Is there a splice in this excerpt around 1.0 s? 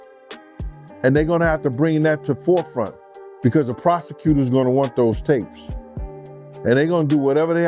yes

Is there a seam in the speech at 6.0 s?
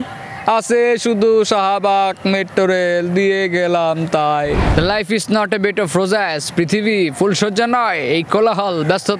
no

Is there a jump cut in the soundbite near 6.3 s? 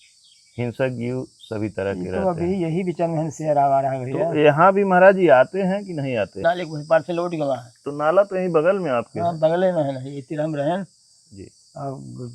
yes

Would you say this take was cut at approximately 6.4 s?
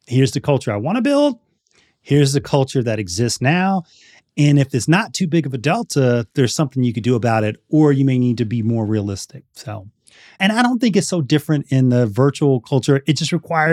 no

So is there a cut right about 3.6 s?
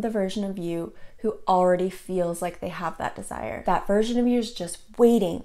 yes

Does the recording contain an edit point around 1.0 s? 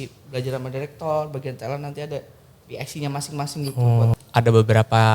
no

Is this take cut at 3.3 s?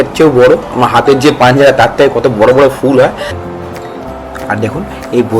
yes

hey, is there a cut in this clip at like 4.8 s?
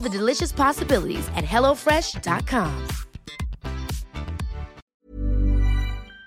yes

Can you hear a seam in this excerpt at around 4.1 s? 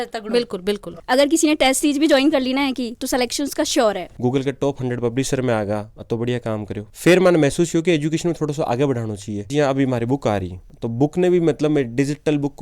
yes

